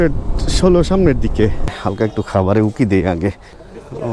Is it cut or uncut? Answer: cut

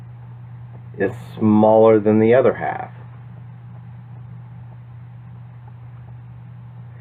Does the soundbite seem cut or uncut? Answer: cut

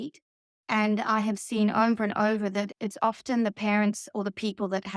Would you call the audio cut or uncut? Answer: cut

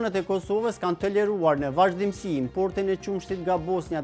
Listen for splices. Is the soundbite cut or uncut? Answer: uncut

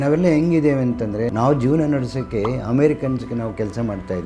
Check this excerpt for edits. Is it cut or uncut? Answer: cut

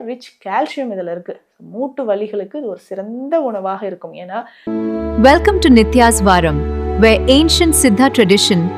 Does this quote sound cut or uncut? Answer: cut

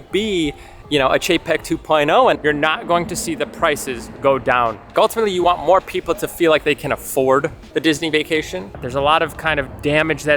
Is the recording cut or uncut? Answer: cut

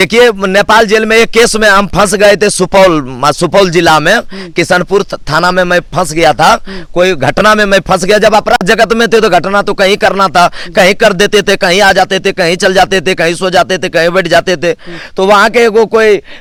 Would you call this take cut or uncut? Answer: uncut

